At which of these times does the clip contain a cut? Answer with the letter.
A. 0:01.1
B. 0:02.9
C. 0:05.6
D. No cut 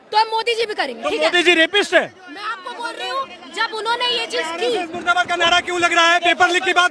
D